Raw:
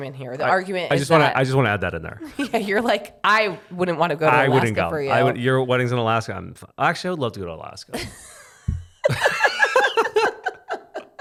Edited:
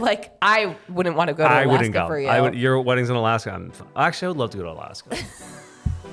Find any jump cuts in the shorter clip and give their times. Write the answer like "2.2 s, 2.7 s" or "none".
none

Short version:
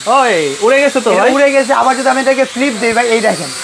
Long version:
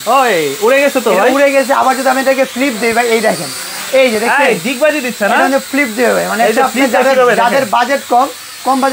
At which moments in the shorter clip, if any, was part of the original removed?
none

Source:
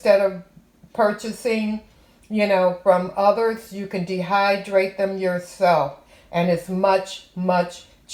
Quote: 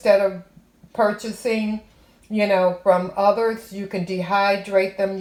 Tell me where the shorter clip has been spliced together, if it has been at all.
none

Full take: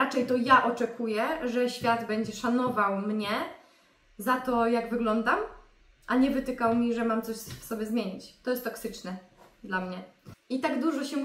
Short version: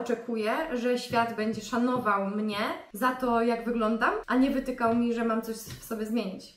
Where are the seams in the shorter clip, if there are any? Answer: 2.8 s, 4.2 s

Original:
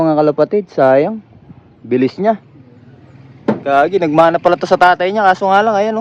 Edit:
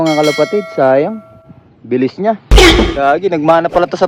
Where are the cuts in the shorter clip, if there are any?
2.6 s

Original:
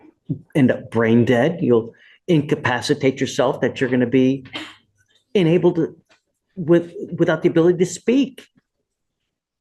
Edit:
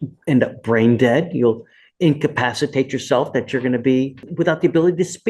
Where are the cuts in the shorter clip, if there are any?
4.2 s

